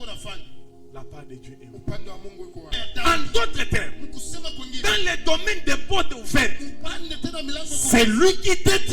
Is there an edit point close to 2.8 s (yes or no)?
yes